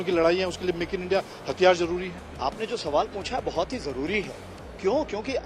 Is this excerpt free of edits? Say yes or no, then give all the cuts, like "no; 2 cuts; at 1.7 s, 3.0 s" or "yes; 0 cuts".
no; 1 cut; at 2.2 s